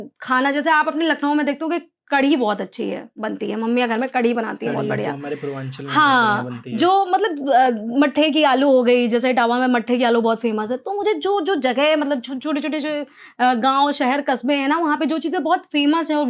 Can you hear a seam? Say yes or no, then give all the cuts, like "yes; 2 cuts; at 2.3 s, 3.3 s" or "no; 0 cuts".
no; 0 cuts